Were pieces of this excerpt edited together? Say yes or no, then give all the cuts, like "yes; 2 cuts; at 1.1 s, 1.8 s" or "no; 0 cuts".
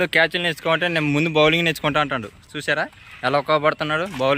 no; 0 cuts